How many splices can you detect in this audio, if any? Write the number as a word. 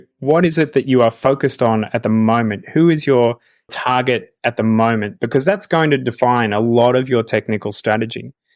zero